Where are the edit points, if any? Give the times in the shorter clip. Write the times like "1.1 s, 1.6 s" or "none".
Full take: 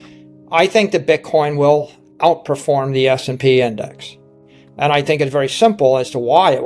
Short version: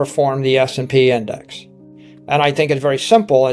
none